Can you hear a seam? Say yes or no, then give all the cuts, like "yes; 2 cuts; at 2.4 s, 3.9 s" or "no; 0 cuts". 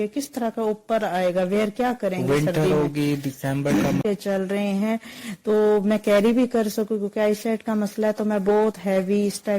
yes; 1 cut; at 4.0 s